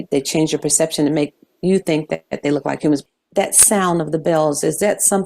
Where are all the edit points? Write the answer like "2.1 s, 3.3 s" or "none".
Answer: 3.1 s